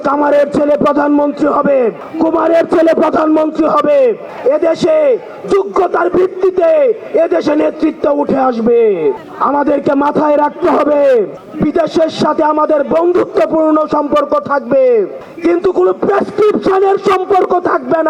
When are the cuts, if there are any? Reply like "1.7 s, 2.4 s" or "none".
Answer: 2.0 s, 4.3 s, 9.2 s, 11.4 s, 15.2 s